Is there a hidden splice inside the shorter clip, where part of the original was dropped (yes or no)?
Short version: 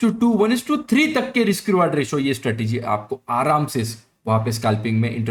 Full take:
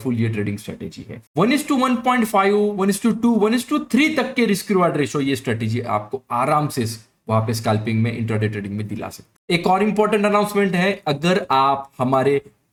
no